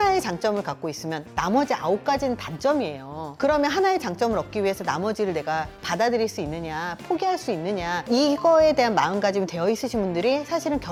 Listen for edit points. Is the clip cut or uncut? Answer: uncut